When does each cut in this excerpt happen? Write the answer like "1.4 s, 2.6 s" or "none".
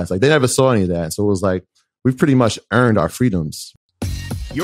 3.6 s

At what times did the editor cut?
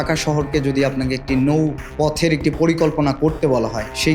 1.8 s

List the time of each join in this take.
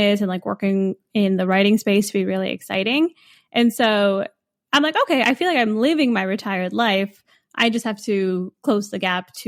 none

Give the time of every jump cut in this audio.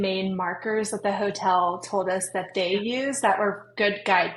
none

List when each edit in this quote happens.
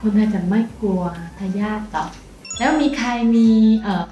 2.3 s

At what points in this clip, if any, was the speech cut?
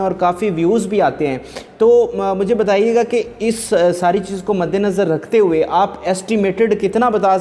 none

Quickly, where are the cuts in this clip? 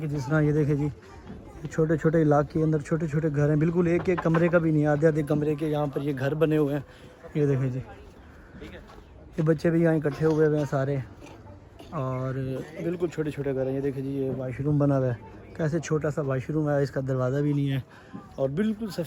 none

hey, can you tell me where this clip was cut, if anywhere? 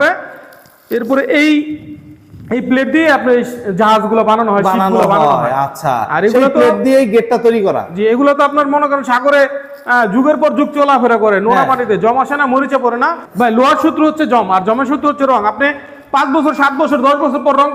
13.2 s

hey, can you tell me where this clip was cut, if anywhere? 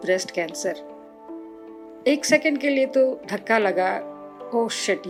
none

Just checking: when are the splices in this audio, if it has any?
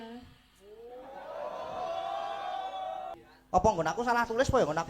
3.2 s

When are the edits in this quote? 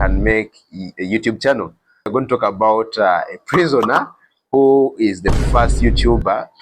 2.1 s

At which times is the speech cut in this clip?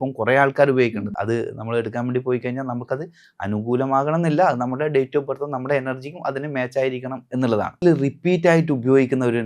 1.1 s, 7.8 s

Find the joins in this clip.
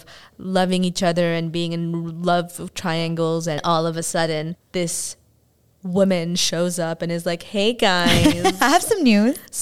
3.6 s

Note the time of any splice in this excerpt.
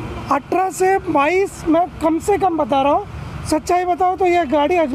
none

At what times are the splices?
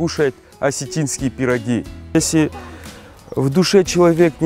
2.1 s

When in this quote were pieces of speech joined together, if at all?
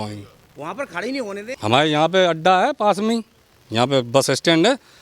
1.6 s

